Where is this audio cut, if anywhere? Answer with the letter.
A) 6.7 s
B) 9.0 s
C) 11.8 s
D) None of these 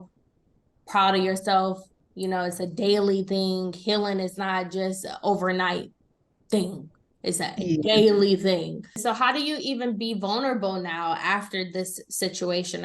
B